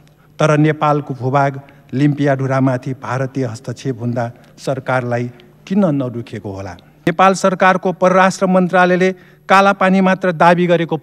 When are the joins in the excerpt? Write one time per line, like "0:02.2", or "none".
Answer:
0:07.1